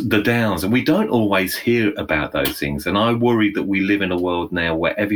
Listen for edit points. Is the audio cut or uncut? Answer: uncut